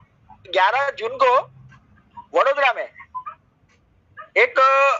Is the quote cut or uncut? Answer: uncut